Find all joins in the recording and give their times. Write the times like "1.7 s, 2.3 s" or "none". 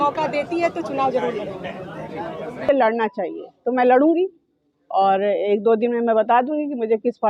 2.7 s